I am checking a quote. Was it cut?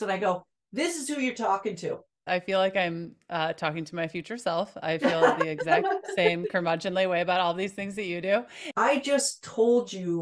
yes; 2 cuts; at 2.2 s, 8.6 s

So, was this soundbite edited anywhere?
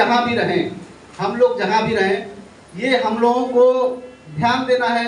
no; 0 cuts

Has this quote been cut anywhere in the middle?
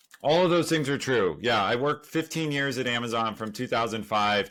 no; 0 cuts

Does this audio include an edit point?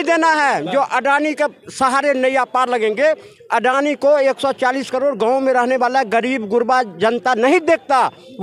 no; 0 cuts

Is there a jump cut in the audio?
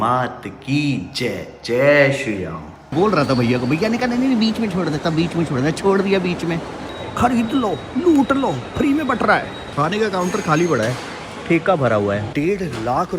yes; 4 cuts; at 2.9 s, 6.8 s, 9.6 s, 12.3 s

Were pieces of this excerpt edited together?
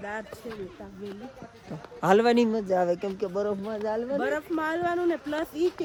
no; 0 cuts

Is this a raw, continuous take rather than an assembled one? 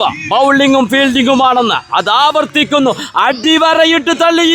yes; 0 cuts

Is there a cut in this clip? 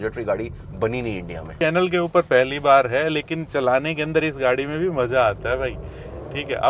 yes; 1 cut; at 1.5 s

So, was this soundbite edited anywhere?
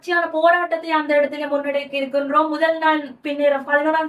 no; 0 cuts

